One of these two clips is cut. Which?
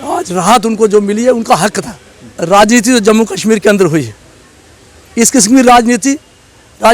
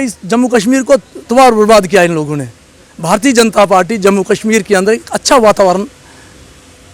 first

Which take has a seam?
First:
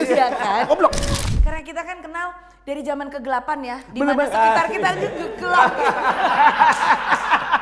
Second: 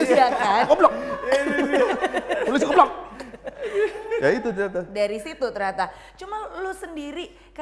first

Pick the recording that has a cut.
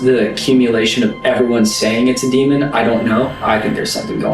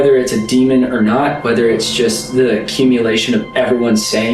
first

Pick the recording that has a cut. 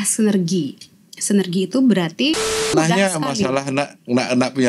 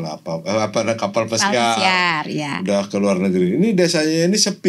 first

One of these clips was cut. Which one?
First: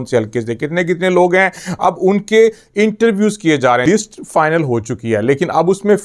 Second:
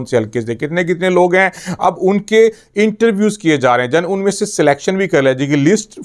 first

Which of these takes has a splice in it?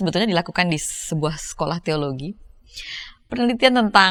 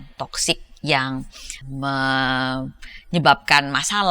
second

